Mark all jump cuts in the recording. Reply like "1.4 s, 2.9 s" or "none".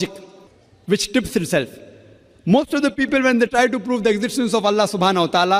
none